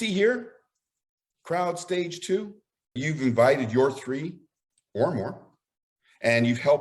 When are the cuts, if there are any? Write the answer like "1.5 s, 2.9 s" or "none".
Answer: 3.0 s